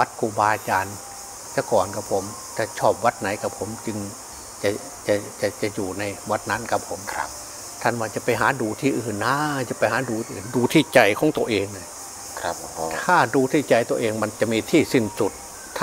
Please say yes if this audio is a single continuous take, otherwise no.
yes